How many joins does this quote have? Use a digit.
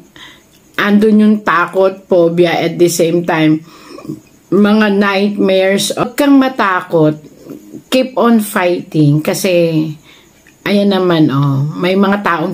1